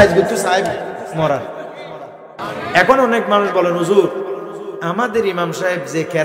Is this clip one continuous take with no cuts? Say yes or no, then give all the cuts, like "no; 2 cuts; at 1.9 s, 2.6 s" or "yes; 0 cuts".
no; 1 cut; at 2.3 s